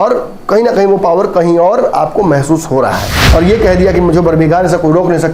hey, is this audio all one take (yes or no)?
no